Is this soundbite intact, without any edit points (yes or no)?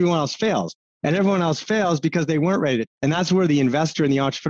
no